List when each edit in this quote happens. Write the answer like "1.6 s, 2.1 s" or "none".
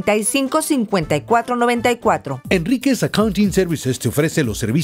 2.3 s